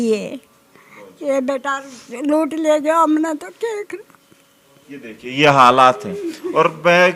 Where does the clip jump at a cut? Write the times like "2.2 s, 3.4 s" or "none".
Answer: none